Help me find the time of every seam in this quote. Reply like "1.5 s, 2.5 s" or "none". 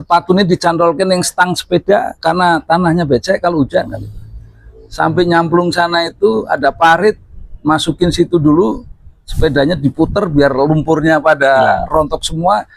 none